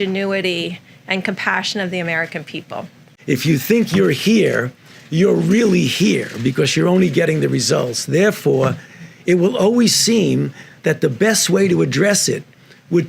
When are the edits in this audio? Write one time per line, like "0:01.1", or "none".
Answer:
0:03.1